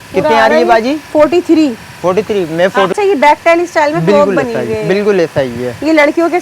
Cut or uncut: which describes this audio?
cut